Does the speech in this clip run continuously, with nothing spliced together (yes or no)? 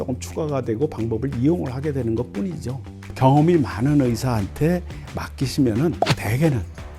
no